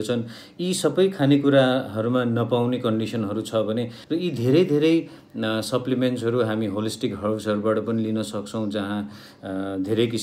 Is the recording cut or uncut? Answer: cut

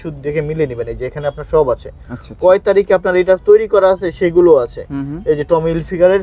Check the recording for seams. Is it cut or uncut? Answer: uncut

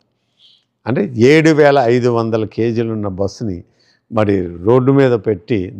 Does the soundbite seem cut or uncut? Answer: uncut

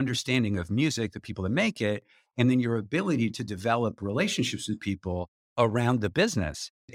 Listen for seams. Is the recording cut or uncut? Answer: uncut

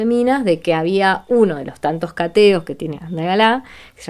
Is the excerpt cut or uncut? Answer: cut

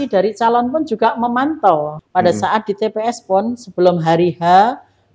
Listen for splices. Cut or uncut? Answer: cut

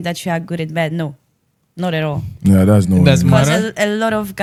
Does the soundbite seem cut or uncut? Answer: uncut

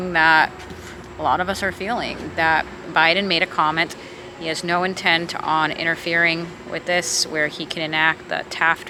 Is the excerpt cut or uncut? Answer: uncut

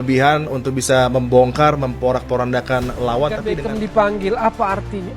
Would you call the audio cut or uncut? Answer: cut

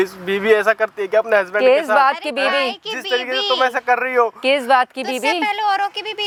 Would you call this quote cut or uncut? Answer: uncut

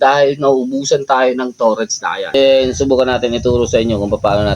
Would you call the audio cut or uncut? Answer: cut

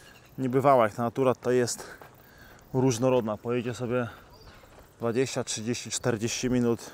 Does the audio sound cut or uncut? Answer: uncut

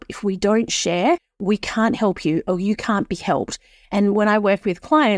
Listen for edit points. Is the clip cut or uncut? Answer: cut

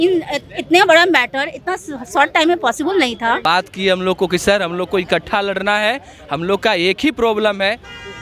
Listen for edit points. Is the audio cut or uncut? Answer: cut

